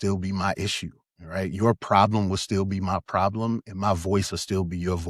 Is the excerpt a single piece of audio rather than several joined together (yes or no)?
yes